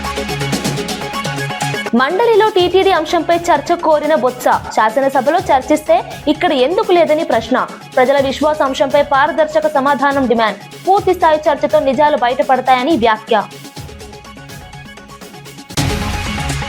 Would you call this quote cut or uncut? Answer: uncut